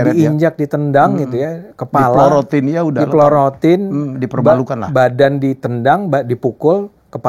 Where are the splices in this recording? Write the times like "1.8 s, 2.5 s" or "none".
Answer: none